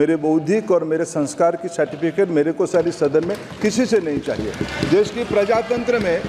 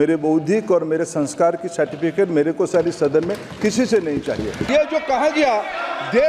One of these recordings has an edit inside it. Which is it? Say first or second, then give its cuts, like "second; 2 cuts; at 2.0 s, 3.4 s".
second; 1 cut; at 4.6 s